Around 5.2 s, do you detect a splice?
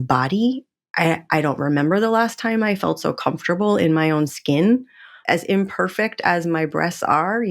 yes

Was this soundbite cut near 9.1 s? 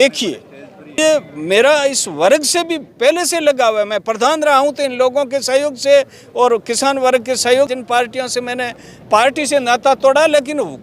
no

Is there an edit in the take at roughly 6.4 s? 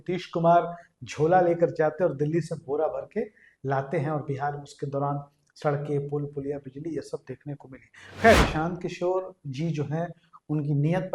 no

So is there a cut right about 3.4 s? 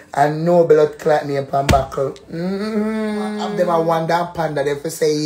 yes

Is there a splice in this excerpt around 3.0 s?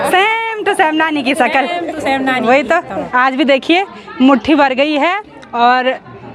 yes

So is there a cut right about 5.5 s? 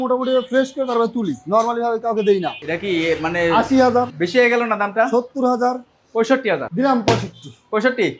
no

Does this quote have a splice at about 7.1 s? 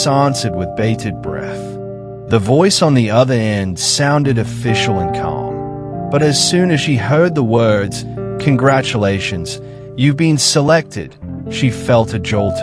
no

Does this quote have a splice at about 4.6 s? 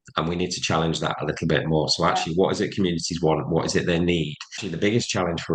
yes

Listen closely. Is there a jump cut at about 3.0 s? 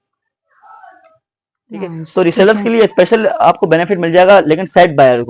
no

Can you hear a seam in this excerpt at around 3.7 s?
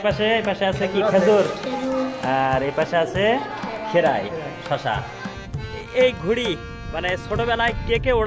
no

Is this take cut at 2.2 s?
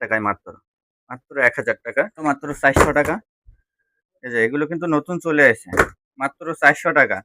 yes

